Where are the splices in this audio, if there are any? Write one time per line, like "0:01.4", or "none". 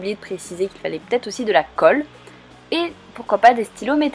0:01.9